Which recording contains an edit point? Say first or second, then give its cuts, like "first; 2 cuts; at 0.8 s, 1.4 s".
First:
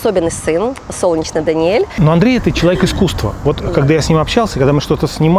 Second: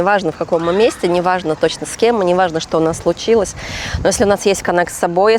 first; 1 cut; at 1.9 s